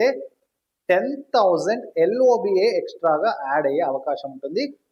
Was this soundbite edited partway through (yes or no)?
no